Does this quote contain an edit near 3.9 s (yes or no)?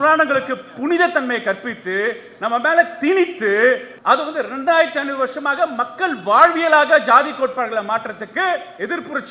yes